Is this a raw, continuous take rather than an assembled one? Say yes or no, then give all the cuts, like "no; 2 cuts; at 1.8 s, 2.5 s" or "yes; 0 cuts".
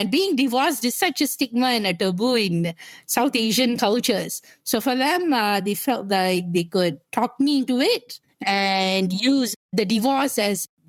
yes; 0 cuts